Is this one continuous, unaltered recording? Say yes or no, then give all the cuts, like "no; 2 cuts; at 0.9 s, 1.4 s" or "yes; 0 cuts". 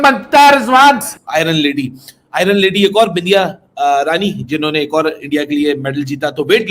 no; 1 cut; at 1.1 s